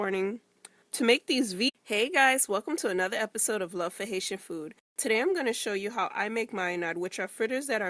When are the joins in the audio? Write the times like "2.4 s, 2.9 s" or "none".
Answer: none

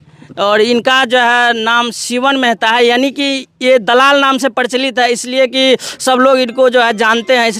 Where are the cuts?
none

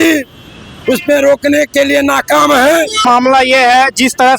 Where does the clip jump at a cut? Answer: 2.9 s

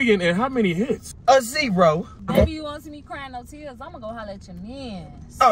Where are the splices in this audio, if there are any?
1.1 s, 2.1 s

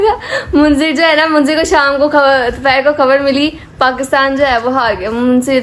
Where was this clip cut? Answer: none

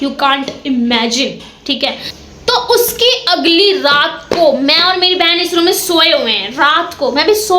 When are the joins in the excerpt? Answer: none

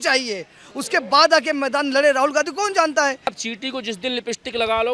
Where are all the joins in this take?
3.4 s

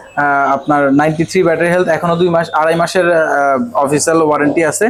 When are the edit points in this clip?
none

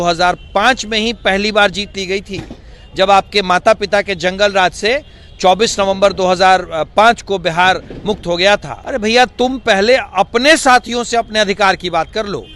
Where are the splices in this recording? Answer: 8.8 s

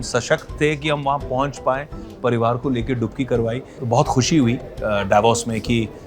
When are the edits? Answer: 3.7 s

